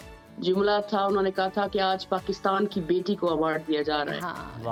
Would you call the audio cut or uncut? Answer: uncut